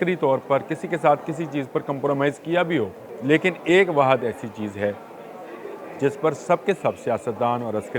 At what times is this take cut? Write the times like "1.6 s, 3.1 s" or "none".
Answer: 3.1 s